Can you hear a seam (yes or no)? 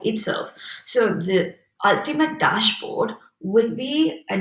no